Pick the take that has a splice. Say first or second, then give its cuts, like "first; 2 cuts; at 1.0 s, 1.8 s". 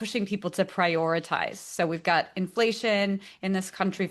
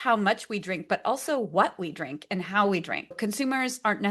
second; 1 cut; at 3.2 s